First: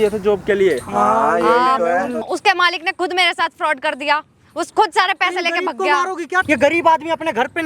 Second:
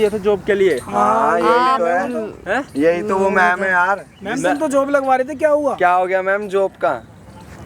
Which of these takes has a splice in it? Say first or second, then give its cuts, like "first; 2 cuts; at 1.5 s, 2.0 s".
first; 2 cuts; at 2.2 s, 6.4 s